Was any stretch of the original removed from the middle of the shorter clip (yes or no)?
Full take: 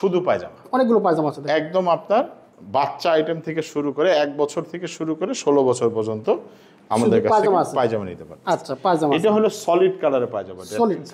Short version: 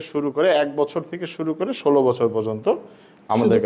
no